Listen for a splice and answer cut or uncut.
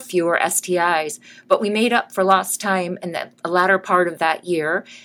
uncut